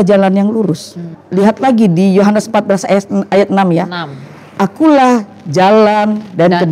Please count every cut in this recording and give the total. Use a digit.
1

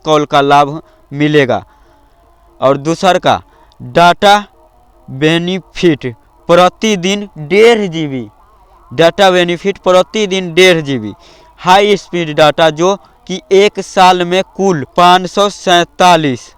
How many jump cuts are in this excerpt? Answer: 1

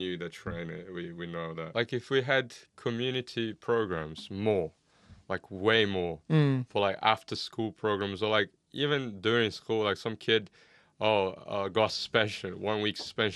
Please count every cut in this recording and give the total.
1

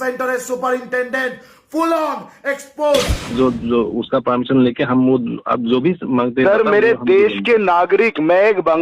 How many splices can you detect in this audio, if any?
1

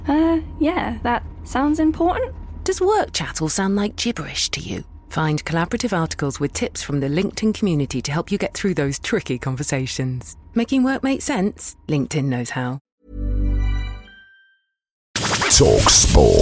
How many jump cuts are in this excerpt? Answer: 2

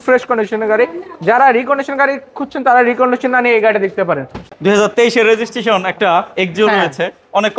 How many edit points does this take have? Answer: 1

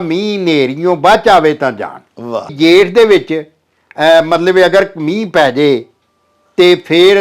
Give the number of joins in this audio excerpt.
1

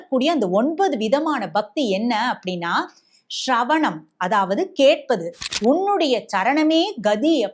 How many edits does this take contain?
1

